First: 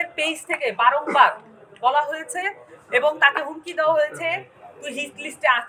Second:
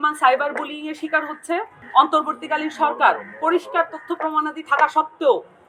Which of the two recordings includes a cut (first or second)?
second